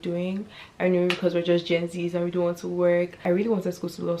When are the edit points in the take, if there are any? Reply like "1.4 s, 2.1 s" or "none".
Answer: 3.2 s